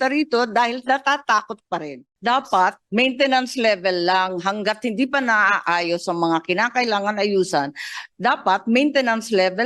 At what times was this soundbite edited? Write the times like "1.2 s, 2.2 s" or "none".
2.0 s

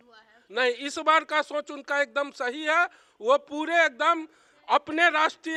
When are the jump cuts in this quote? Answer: none

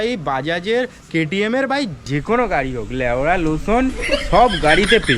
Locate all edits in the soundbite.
none

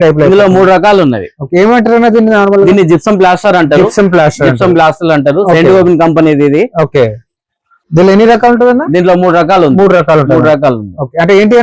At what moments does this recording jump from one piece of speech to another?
none

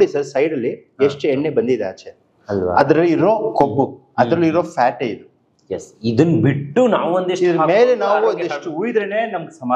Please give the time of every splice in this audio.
none

